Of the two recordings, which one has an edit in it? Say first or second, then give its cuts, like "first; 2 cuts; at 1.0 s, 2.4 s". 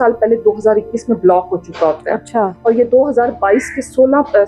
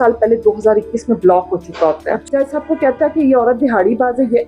second; 1 cut; at 2.1 s